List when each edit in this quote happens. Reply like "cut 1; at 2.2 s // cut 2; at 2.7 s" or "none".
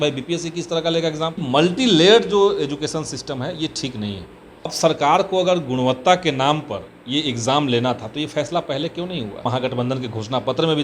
cut 1; at 1.4 s // cut 2; at 4.7 s // cut 3; at 9.5 s

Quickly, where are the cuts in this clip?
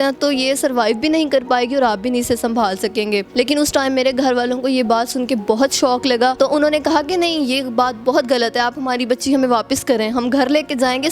cut 1; at 3.3 s // cut 2; at 6.4 s

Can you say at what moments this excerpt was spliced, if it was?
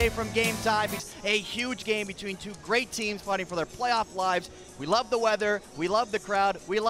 cut 1; at 1.1 s

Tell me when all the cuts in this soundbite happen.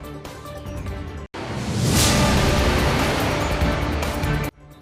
cut 1; at 1.3 s

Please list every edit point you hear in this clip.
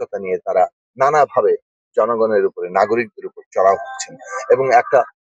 none

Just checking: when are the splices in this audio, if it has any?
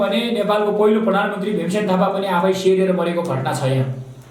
none

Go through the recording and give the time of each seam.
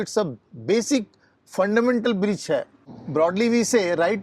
cut 1; at 2.8 s

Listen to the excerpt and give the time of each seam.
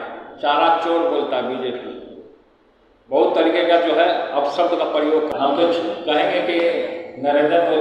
cut 1; at 5.3 s

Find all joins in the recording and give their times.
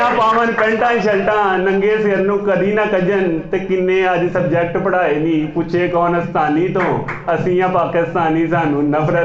none

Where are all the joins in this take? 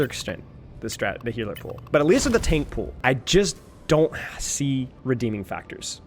cut 1; at 2.8 s // cut 2; at 4.9 s

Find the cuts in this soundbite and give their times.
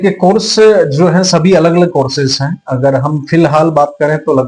none

